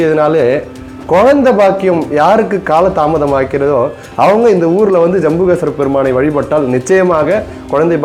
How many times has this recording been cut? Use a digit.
0